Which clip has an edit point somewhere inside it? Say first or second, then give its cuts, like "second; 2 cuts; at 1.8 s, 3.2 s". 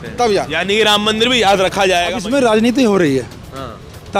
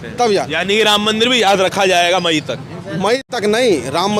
first; 1 cut; at 2.2 s